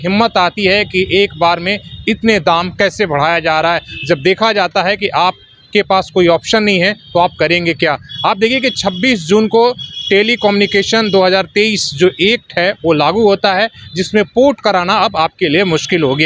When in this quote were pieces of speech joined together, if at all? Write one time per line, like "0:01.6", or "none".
none